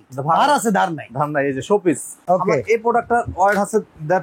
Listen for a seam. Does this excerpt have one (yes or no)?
yes